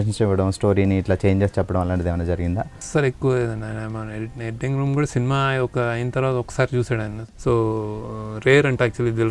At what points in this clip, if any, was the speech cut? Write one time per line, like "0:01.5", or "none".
0:02.7
0:07.2